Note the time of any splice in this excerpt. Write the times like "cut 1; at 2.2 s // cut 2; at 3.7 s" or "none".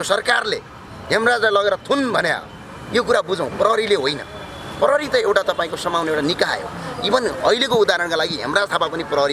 none